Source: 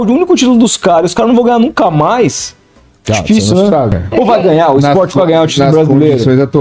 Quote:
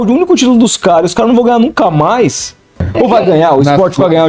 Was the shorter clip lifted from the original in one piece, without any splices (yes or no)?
no